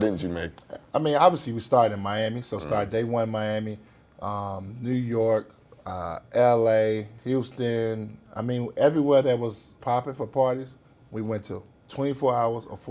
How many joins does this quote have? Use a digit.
3